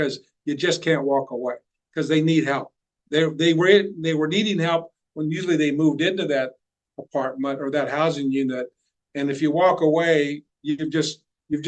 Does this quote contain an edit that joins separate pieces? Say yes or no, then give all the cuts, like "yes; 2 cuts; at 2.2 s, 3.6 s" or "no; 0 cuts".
no; 0 cuts